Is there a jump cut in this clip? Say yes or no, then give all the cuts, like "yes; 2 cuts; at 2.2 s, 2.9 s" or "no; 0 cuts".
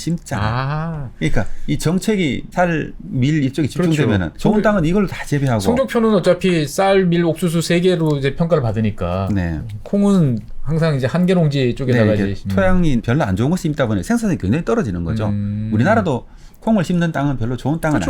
no; 0 cuts